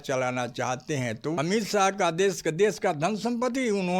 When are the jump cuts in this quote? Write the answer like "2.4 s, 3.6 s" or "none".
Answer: 1.3 s